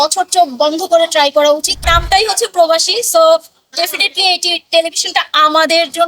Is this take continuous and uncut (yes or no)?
no